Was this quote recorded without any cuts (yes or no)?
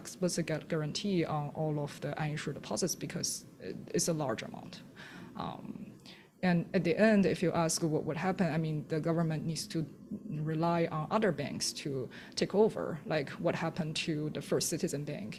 yes